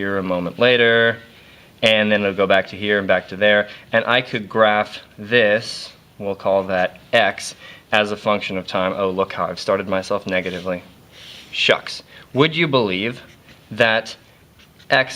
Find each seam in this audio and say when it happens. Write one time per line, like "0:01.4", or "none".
0:03.0